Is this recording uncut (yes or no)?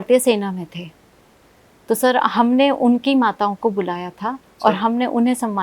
yes